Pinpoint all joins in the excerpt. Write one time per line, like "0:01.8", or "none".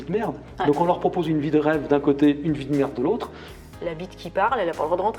0:03.7